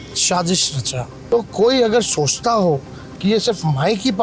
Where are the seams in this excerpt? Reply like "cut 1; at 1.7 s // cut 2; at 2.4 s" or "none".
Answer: cut 1; at 1.1 s